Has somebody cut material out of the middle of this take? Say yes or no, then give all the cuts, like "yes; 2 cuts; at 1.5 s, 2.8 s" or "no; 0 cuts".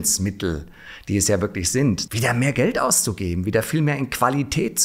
yes; 1 cut; at 2.1 s